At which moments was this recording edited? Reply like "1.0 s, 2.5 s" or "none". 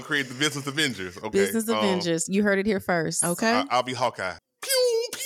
4.3 s